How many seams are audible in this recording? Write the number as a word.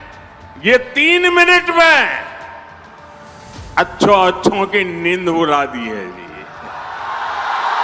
zero